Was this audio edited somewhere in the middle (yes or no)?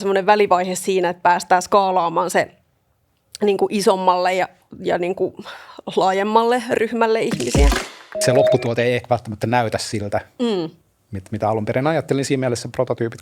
yes